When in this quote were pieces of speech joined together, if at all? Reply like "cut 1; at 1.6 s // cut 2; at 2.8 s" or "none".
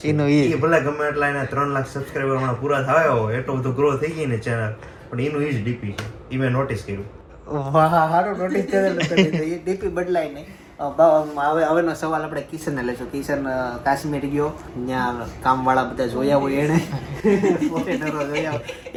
none

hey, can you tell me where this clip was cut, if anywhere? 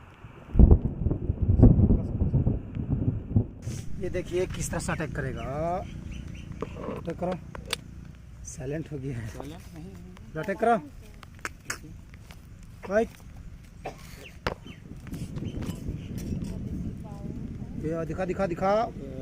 cut 1; at 3.6 s

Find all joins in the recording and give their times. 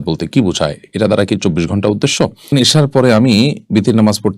cut 1; at 2.5 s

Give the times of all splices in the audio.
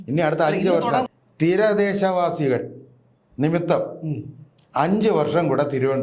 cut 1; at 1.1 s

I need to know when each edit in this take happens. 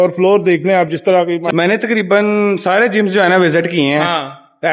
cut 1; at 1.4 s

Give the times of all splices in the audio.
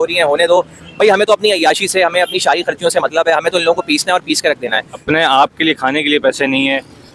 cut 1; at 5.0 s

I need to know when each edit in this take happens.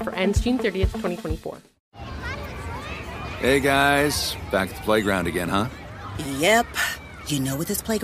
cut 1; at 1.7 s

